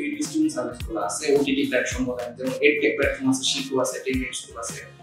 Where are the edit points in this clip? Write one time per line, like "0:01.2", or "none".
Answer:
none